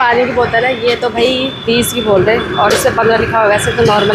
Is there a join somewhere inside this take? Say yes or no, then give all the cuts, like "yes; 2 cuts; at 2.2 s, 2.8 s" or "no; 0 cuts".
no; 0 cuts